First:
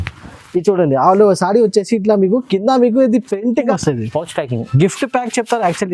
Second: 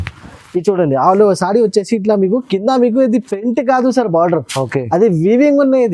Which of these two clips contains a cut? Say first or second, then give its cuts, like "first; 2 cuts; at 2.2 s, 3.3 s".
first; 1 cut; at 3.7 s